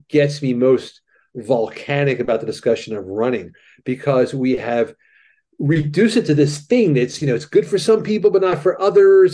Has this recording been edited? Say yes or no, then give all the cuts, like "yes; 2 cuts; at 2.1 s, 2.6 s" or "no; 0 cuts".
no; 0 cuts